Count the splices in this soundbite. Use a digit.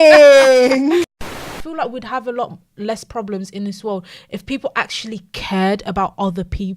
1